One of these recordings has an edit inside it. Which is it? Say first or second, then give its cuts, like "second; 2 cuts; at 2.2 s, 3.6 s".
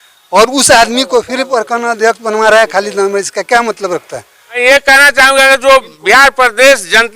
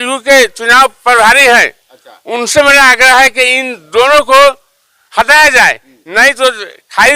first; 1 cut; at 4.4 s